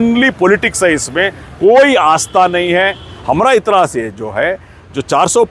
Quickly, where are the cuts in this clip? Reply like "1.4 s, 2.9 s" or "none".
3.1 s